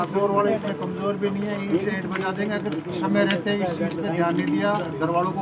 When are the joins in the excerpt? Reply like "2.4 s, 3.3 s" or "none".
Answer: none